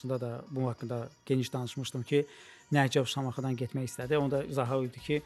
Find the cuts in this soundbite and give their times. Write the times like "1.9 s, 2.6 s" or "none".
none